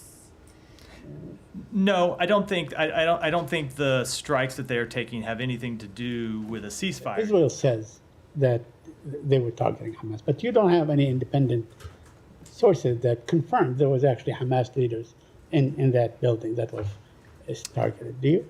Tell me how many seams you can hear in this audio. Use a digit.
1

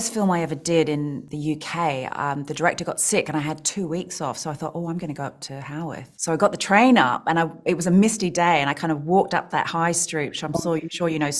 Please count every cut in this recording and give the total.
2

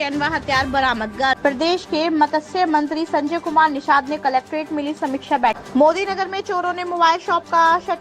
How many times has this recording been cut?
2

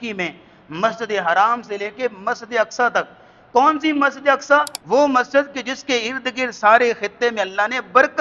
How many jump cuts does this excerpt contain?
1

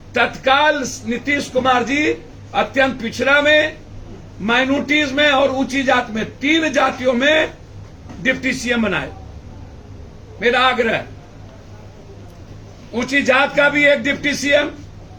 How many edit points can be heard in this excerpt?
0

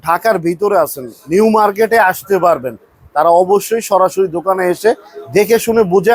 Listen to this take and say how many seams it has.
0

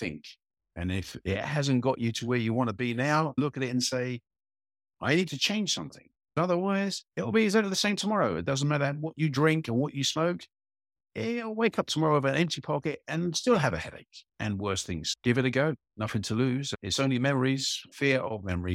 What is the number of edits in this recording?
5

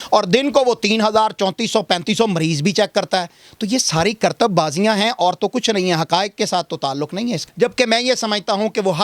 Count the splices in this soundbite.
1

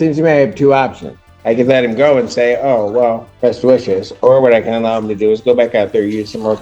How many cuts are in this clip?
1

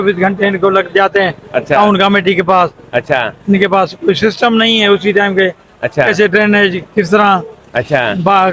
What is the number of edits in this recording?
0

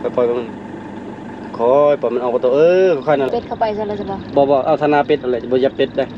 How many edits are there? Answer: 1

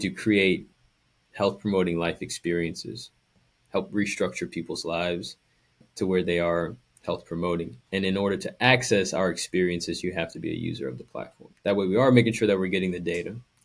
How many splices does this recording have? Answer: 2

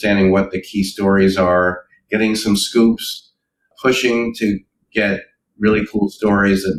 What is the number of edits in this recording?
1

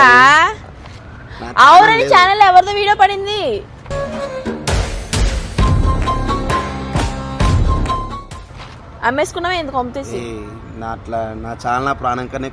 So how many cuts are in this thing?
0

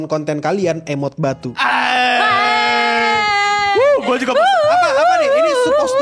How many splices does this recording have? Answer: 0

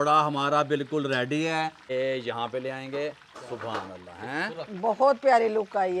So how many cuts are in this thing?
1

